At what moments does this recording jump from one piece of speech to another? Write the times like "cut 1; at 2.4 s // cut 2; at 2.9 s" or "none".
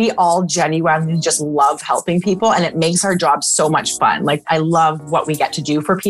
cut 1; at 4.4 s

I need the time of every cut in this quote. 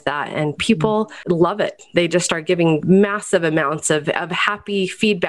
cut 1; at 1.2 s // cut 2; at 2.8 s

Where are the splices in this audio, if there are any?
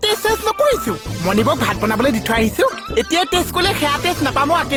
none

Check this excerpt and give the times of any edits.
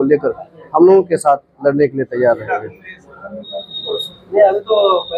none

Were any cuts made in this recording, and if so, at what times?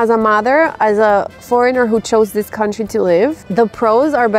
cut 1; at 3.4 s

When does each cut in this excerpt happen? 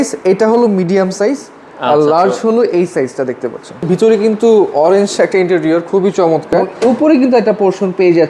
cut 1; at 3.8 s // cut 2; at 6.7 s

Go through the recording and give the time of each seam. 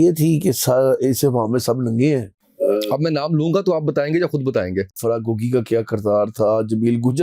cut 1; at 2.4 s // cut 2; at 5.0 s

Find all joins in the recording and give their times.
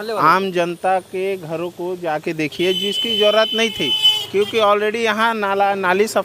none

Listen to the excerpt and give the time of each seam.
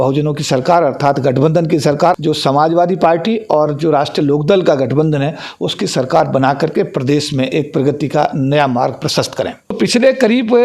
cut 1; at 2.2 s // cut 2; at 9.8 s

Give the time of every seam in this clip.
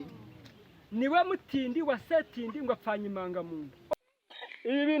cut 1; at 3.9 s

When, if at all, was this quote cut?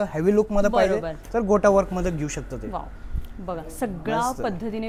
none

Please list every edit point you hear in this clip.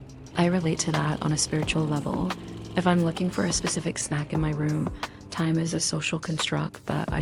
none

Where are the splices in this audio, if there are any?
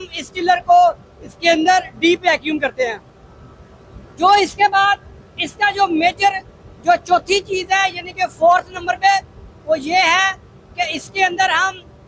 none

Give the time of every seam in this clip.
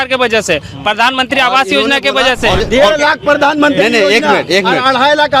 cut 1; at 2.6 s

